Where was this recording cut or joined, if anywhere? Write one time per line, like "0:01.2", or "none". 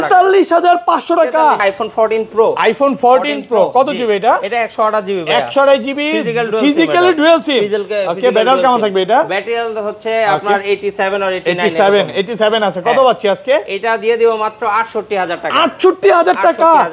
0:01.6

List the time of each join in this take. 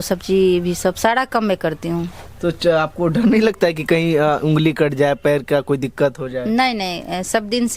none

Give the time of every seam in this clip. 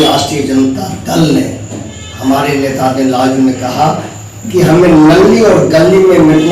none

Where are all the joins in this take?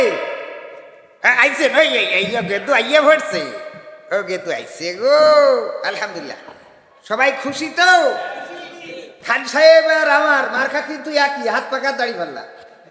none

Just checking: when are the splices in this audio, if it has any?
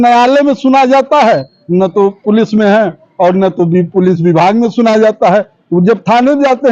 none

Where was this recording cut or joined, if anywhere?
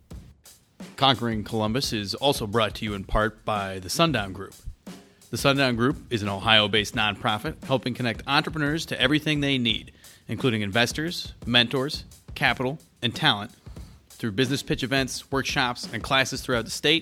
0:00.9

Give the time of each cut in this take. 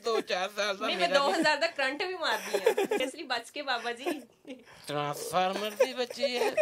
0:03.0

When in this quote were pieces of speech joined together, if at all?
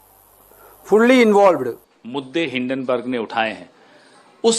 0:01.9

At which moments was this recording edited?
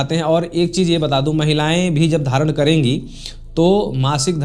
none

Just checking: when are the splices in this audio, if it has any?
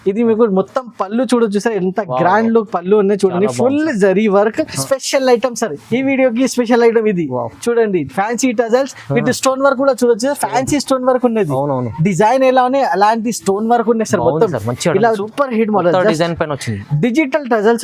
0:04.8
0:15.2

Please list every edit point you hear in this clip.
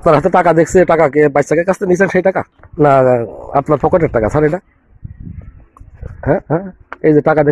0:02.6

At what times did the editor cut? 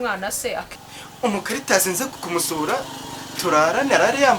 0:00.7
0:02.1

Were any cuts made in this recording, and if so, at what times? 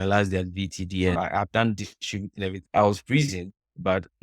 0:01.2
0:02.6

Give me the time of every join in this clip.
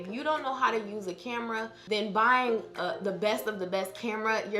0:01.7

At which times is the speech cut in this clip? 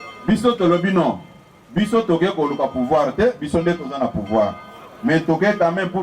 none

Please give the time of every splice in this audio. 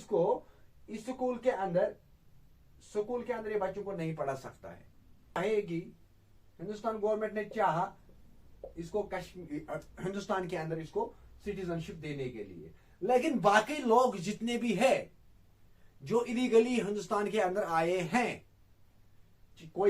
0:05.4

